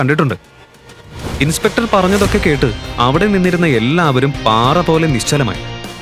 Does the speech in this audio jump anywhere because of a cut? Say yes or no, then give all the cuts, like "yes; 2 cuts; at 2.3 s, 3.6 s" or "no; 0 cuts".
no; 0 cuts